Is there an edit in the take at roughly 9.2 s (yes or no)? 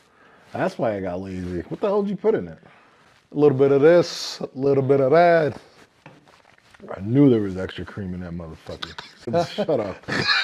yes